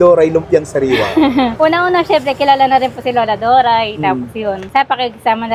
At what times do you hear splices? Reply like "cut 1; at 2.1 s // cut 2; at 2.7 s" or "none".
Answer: none